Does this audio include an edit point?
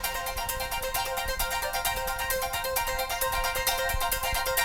no; 0 cuts

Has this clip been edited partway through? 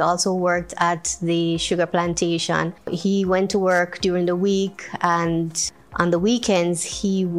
yes; 2 cuts; at 2.9 s, 5.6 s

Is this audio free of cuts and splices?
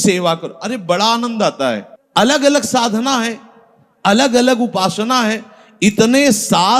no; 1 cut; at 1.9 s

